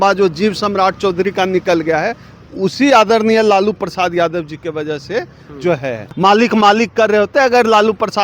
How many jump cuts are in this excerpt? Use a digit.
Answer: 1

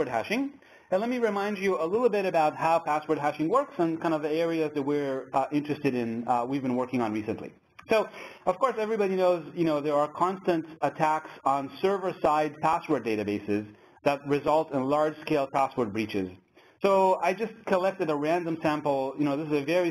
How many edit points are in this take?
1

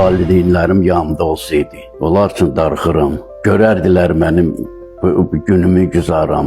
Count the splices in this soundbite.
2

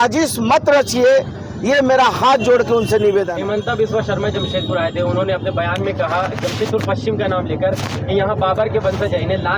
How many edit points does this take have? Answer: 1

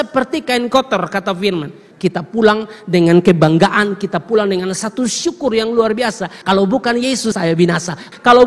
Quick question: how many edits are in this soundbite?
3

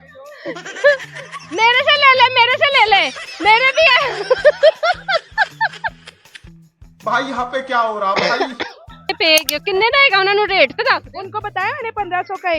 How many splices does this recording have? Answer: 1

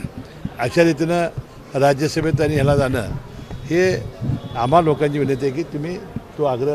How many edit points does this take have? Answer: 0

